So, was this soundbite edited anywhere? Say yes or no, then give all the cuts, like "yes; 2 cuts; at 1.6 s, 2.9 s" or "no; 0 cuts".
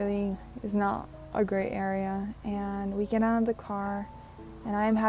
no; 0 cuts